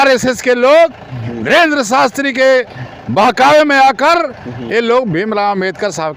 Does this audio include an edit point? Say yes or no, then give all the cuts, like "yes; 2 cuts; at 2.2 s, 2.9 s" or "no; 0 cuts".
no; 0 cuts